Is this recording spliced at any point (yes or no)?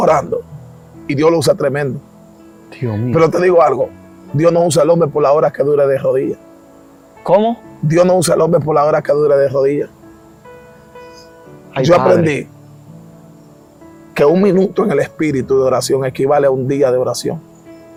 no